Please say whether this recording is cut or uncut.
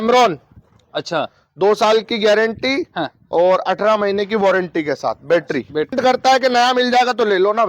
cut